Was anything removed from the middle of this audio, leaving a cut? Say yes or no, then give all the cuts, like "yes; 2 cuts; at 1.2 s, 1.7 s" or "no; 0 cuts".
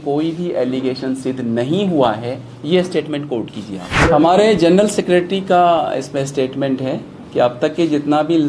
yes; 1 cut; at 3.9 s